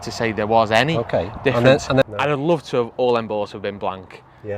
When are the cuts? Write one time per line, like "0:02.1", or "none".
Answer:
0:02.0

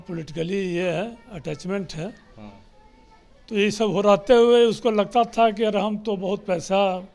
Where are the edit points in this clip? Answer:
none

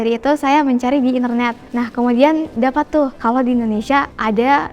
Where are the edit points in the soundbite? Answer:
0:01.6

